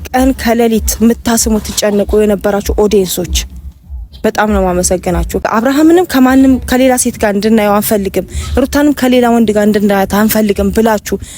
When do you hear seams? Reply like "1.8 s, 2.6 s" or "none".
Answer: 5.5 s

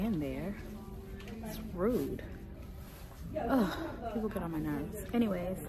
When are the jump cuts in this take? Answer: none

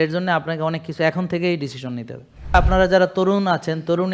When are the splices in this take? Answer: 2.5 s

